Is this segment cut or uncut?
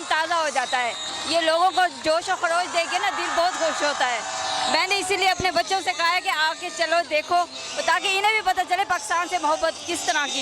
uncut